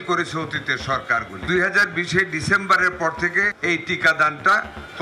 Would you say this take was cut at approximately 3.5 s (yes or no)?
yes